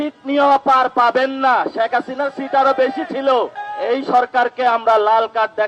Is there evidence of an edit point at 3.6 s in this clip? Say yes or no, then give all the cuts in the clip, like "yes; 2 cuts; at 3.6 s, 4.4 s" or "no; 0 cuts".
yes; 1 cut; at 3.6 s